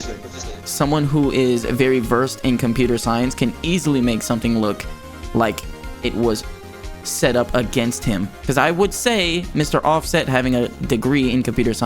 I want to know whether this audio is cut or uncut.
cut